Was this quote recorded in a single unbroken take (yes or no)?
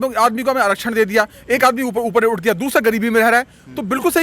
yes